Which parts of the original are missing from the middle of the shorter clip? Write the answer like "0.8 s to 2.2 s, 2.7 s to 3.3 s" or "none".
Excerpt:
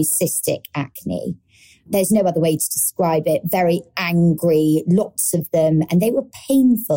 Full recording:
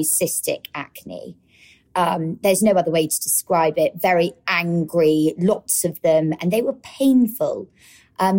1.8 s to 2.4 s